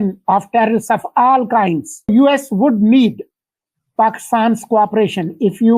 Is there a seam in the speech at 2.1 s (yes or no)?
yes